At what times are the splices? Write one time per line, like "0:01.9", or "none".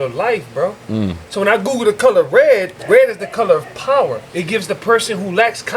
0:02.7
0:04.3